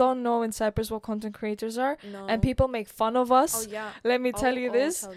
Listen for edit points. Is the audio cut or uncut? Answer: uncut